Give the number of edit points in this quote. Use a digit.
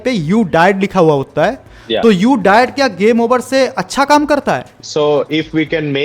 1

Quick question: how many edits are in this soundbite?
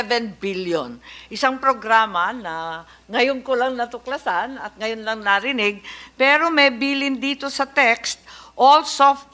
0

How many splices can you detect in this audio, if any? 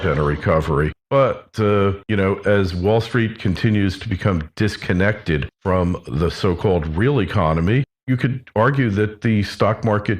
1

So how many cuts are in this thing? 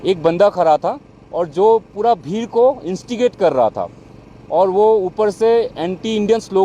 0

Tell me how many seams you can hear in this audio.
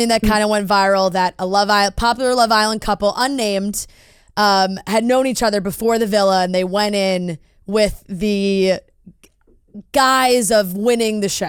0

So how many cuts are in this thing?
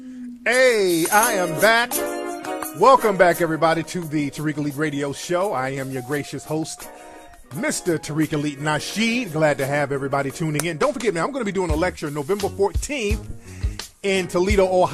0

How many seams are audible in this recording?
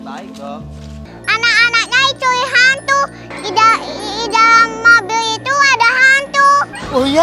1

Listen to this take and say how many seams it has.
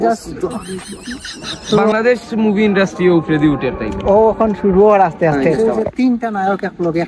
2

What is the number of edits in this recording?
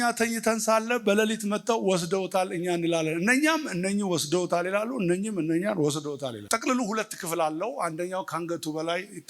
1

